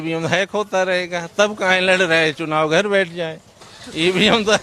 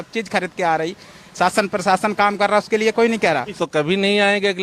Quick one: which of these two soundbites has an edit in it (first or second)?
second